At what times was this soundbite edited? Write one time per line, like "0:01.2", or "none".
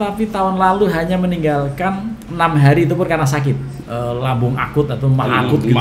0:03.7